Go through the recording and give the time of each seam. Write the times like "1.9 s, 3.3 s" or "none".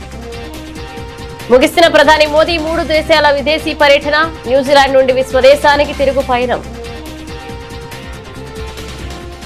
1.3 s